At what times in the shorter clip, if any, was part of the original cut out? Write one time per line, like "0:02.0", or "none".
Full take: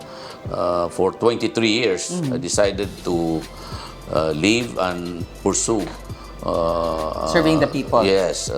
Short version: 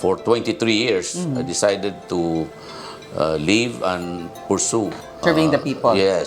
0:05.2